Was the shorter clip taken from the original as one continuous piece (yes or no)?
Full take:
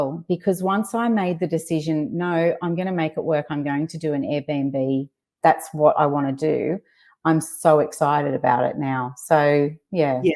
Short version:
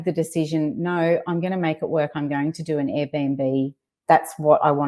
yes